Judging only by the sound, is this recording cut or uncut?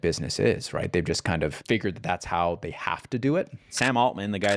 cut